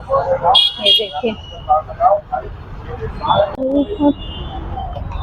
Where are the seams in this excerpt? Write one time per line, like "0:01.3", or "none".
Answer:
0:03.6